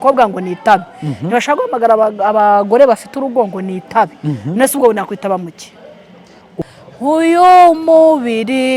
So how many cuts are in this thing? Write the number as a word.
one